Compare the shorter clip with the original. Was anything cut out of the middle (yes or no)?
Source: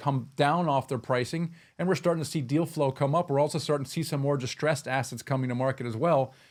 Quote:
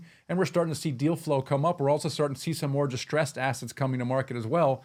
no